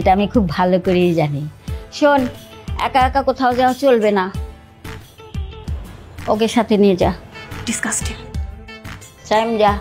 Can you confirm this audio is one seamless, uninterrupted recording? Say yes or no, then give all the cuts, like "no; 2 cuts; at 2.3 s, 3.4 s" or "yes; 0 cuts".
yes; 0 cuts